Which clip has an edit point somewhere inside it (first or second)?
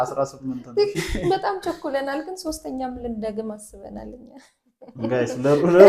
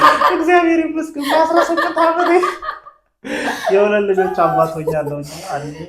first